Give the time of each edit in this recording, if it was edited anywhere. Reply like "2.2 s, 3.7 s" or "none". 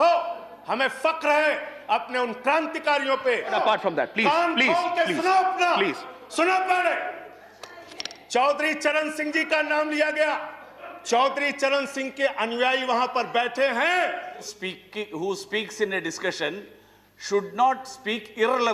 3.5 s, 14.4 s